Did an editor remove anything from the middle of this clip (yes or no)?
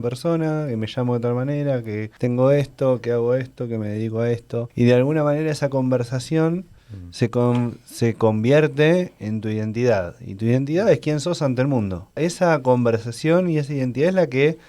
yes